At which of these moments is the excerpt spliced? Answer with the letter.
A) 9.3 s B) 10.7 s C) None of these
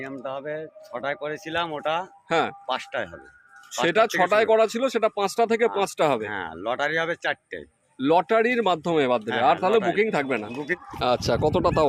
B